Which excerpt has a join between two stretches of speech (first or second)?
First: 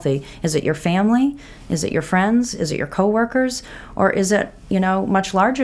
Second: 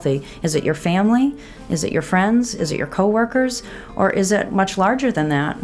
second